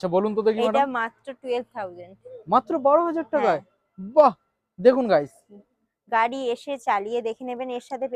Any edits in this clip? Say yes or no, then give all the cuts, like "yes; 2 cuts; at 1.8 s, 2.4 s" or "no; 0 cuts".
no; 0 cuts